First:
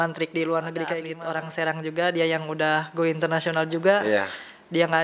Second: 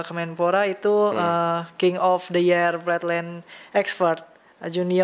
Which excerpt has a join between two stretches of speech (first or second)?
first